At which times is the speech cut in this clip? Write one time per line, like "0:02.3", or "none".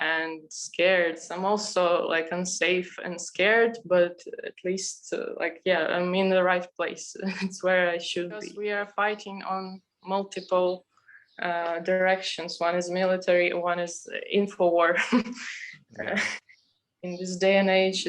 0:01.3
0:08.5

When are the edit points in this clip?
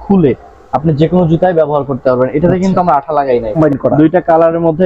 0:03.6

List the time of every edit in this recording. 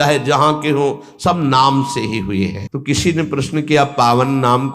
0:02.7

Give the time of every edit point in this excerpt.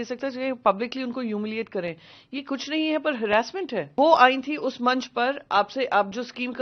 0:03.9

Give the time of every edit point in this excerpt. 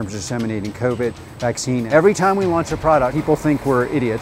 0:01.9
0:03.2

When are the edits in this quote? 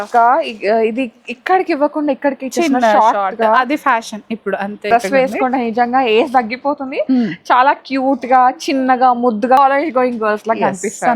0:04.9
0:09.6

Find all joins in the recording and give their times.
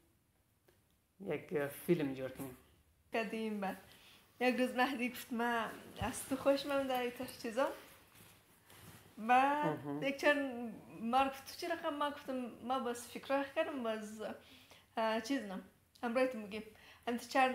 0:03.1

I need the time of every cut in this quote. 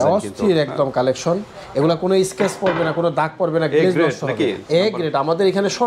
none

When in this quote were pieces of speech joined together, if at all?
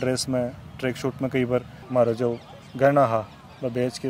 0:01.8

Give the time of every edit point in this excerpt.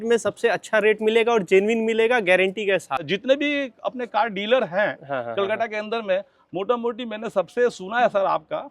0:03.1

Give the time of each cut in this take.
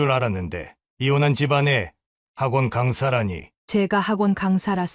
0:03.5

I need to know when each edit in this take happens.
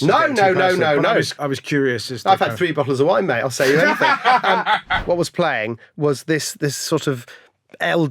0:01.3
0:04.9

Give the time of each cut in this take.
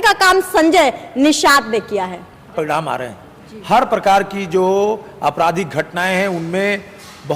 0:02.4

